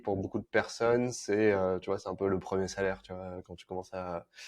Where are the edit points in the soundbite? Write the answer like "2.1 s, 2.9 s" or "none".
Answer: none